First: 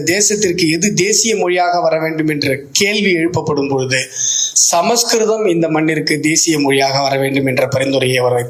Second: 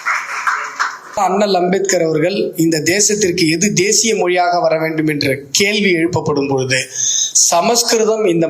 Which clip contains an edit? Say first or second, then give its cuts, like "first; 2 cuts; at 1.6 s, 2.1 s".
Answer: second; 1 cut; at 1.2 s